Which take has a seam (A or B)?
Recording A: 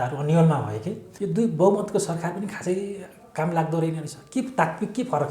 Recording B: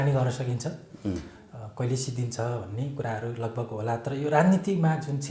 A